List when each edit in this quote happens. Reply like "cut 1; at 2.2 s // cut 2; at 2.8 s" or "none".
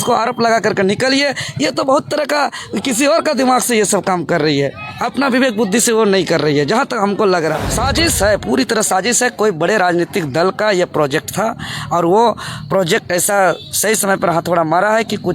cut 1; at 7.7 s